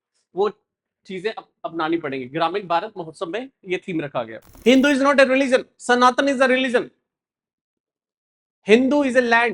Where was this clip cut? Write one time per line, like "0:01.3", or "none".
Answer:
0:04.4